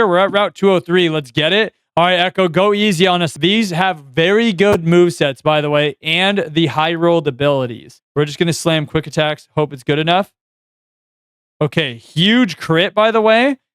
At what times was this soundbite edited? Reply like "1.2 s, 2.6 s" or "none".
1.8 s, 3.3 s, 7.9 s